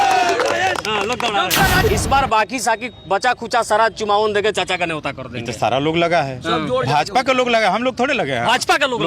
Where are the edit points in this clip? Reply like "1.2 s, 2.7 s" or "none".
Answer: 1.9 s